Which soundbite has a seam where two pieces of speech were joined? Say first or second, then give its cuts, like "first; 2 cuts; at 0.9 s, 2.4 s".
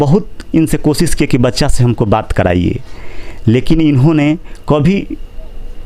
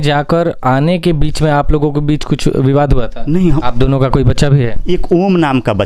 second; 2 cuts; at 3.6 s, 4.8 s